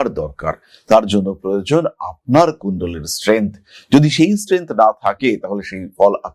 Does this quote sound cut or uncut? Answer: uncut